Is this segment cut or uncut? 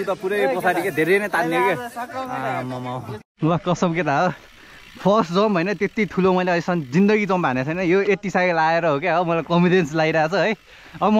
cut